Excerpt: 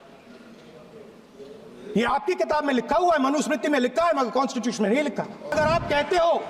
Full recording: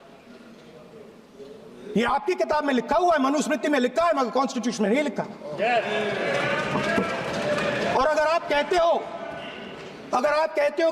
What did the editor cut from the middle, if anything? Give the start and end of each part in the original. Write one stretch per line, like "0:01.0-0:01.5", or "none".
0:05.5-0:08.1